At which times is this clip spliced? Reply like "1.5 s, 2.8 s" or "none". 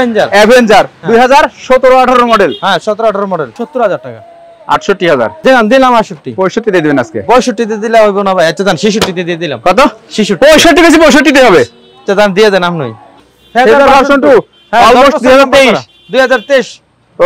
3.5 s, 5.4 s, 13.0 s